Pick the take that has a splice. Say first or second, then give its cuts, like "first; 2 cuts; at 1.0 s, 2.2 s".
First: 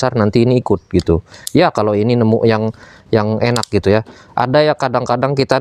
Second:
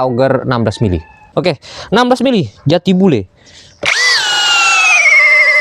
second; 1 cut; at 1.1 s